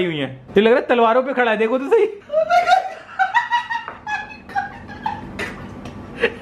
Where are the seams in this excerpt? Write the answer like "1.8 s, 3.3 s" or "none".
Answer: none